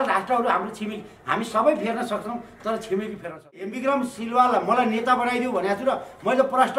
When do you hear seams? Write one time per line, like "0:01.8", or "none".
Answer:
0:03.7